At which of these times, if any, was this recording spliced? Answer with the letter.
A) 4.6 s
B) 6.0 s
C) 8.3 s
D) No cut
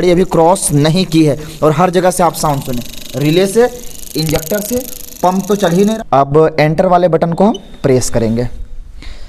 B